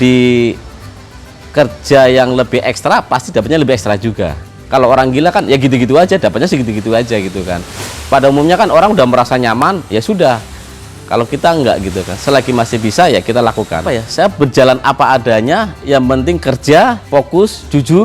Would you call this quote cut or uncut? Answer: cut